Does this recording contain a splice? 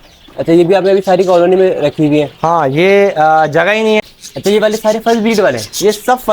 yes; 1 cut; at 4.2 s

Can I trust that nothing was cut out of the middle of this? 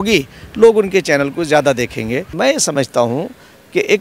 no; 1 cut; at 2.3 s

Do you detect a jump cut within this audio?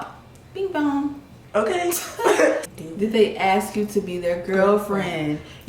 yes; 1 cut; at 2.6 s

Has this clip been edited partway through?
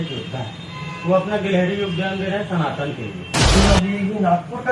yes; 1 cut; at 3.6 s

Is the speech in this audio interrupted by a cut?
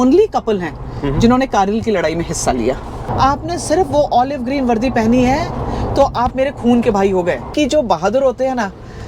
yes; 2 cuts; at 3.1 s, 7.5 s

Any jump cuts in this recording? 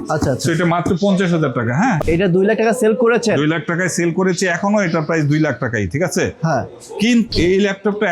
yes; 2 cuts; at 2.0 s, 7.3 s

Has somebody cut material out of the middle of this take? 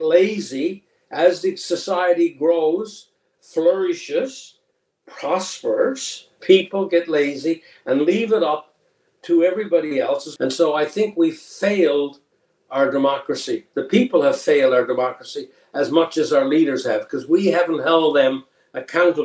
yes; 1 cut; at 10.3 s

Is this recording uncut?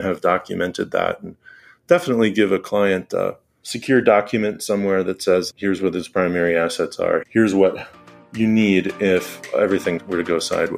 yes; 0 cuts

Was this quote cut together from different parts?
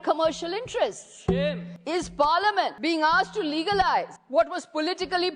yes; 3 cuts; at 1.7 s, 2.8 s, 4.2 s

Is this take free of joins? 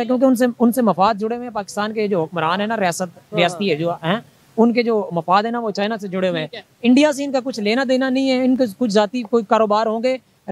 yes; 0 cuts

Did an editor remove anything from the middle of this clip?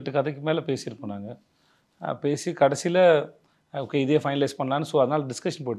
no; 0 cuts

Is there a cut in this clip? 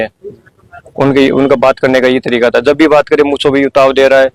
no; 0 cuts

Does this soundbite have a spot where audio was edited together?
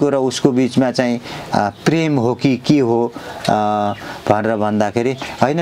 no; 0 cuts

